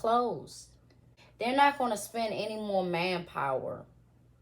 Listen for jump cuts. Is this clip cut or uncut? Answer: cut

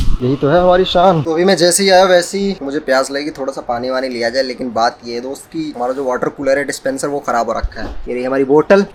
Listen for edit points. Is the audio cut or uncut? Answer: uncut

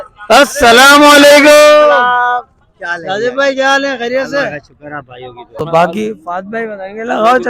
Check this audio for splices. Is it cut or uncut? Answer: cut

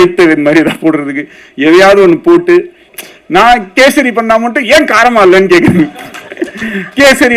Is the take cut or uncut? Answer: cut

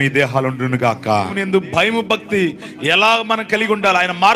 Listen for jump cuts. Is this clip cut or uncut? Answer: cut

